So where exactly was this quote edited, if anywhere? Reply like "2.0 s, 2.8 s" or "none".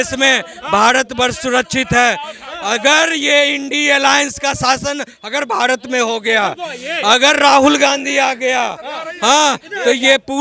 none